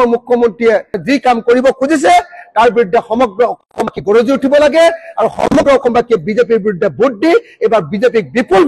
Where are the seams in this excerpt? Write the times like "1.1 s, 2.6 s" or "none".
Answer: none